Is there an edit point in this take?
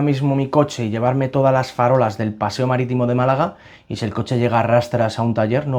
no; 0 cuts

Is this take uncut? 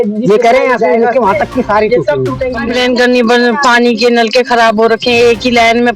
no; 1 cut; at 2.5 s

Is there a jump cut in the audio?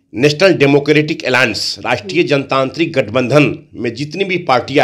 no; 0 cuts

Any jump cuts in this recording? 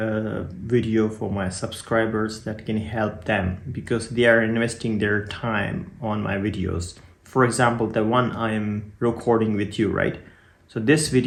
no; 0 cuts

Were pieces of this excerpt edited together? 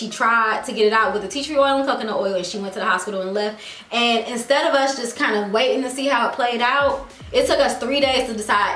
no; 0 cuts

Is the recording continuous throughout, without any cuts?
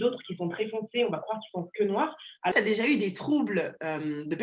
no; 1 cut; at 2.5 s

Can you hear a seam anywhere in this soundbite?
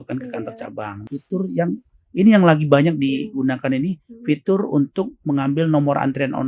yes; 1 cut; at 1.0 s

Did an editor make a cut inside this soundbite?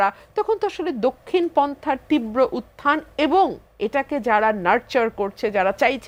no; 0 cuts

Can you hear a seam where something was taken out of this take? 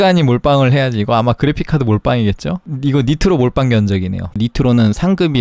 yes; 2 cuts; at 2.7 s, 4.3 s

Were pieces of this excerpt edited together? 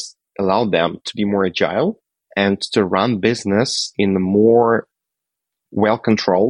no; 0 cuts

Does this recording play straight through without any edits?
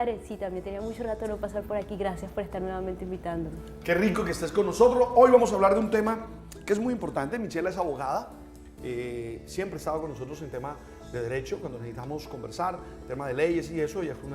no; 1 cut; at 13.0 s

